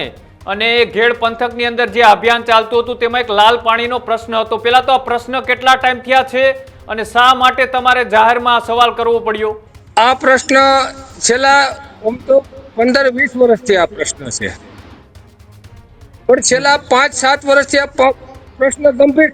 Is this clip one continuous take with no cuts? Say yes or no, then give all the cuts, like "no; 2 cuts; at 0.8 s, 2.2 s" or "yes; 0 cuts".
yes; 0 cuts